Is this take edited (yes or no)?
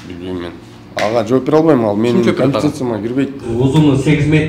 yes